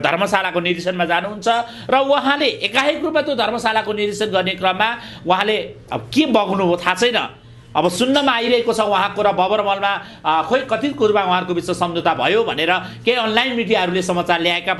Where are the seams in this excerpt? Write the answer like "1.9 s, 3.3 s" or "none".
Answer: none